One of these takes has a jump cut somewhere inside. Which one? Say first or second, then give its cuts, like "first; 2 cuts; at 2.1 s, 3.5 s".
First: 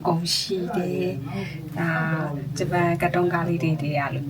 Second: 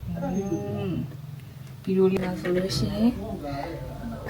second; 1 cut; at 2.2 s